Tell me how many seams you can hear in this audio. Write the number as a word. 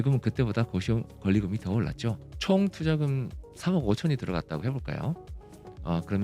one